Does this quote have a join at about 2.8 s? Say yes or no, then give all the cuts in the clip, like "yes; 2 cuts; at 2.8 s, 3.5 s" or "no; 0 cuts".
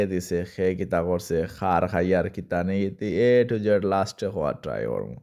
no; 0 cuts